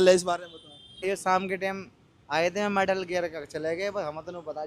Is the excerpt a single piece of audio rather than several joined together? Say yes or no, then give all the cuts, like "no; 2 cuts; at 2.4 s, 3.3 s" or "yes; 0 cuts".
no; 1 cut; at 1.0 s